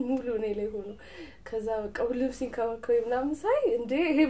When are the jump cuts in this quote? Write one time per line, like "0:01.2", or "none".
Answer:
none